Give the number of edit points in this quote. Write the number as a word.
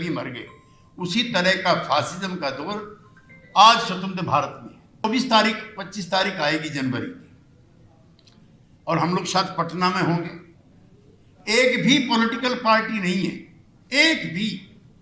one